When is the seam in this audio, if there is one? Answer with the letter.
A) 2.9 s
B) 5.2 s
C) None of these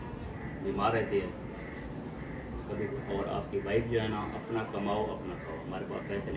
A